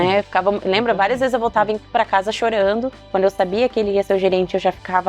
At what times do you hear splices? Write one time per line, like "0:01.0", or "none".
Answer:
0:03.0